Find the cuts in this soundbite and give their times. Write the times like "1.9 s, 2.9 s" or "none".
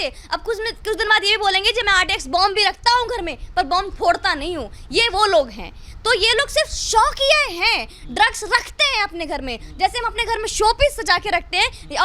none